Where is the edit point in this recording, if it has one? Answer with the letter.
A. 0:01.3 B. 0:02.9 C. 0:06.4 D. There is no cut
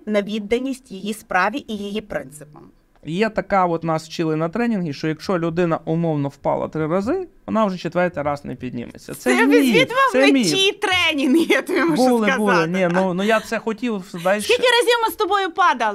B